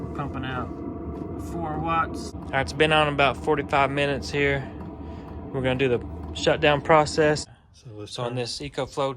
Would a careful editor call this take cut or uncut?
cut